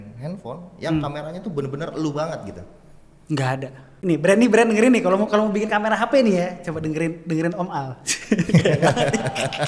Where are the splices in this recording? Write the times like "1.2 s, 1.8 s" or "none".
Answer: 3.8 s